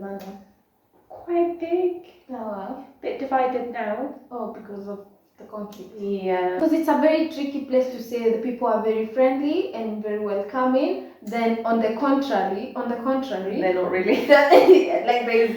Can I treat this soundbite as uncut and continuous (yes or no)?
no